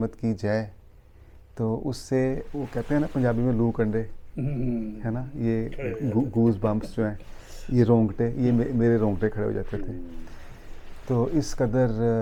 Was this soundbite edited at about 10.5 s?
no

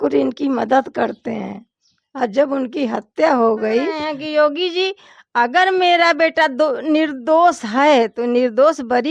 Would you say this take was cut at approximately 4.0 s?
yes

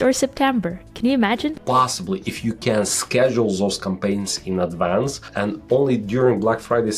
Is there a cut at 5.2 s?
yes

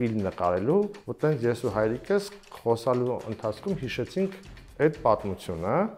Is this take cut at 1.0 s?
yes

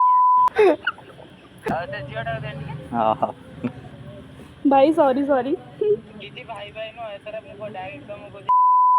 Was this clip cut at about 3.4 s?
no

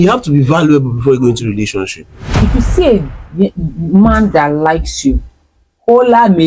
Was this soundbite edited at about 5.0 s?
no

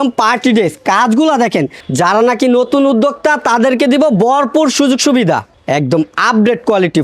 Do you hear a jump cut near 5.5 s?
yes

